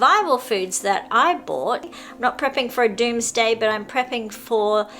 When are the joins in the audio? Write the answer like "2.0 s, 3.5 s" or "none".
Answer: 1.9 s